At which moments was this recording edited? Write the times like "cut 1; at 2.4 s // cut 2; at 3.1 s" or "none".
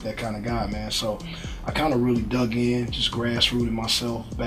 none